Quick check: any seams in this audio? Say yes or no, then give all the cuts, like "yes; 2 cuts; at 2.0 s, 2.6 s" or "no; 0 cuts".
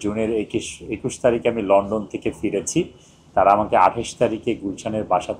no; 0 cuts